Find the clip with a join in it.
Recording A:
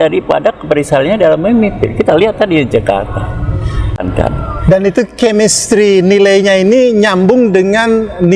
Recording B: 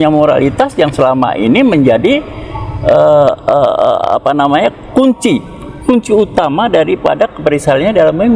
A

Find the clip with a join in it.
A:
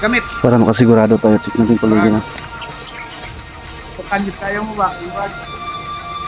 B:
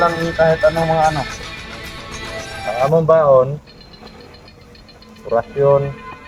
A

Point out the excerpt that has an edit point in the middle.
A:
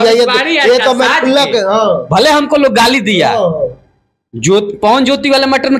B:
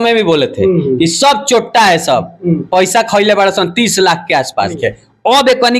B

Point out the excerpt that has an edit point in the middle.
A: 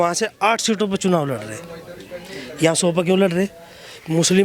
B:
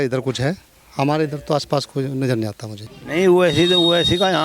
B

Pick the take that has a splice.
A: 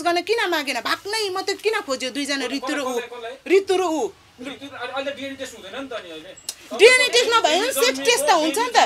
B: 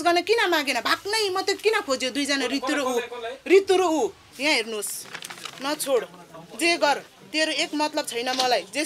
B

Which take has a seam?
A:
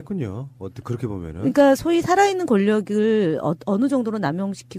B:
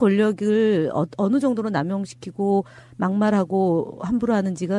A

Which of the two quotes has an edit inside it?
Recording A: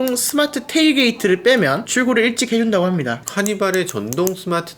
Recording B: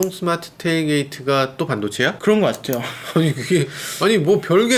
A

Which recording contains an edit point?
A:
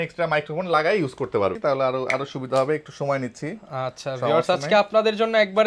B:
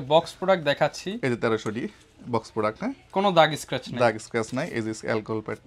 A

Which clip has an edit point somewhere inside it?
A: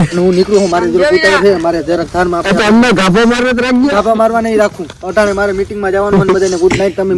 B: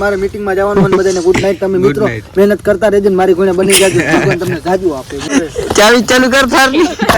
B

